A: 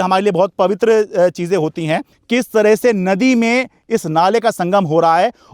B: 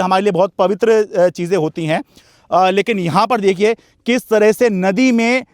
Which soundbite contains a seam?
A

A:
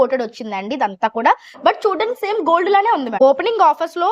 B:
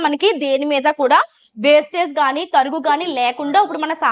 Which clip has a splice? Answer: A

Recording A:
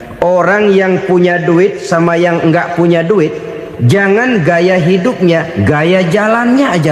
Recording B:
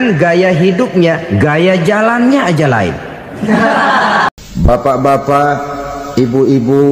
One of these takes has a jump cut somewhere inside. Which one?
B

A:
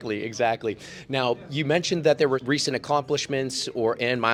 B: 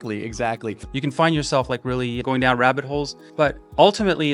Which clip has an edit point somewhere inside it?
B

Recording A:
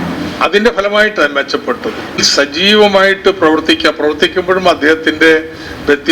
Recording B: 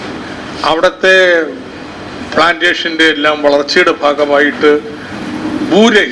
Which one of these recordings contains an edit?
A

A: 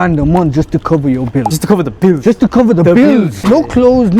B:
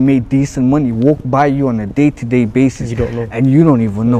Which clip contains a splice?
A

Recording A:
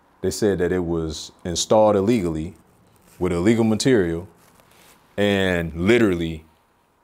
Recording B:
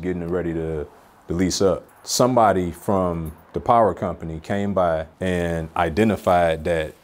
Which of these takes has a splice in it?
B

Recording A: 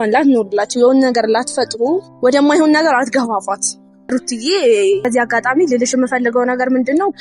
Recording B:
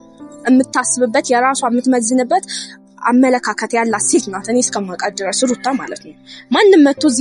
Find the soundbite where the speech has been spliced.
A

